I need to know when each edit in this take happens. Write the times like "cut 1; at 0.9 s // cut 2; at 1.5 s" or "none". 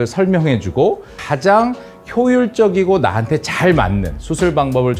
cut 1; at 1.2 s